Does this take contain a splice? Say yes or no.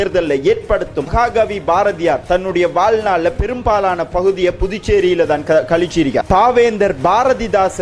yes